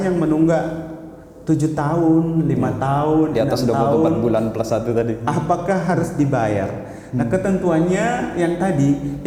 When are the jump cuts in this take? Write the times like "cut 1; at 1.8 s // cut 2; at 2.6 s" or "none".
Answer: none